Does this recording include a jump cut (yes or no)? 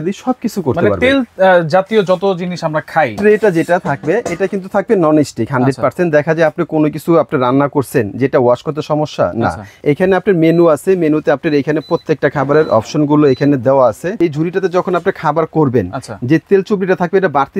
yes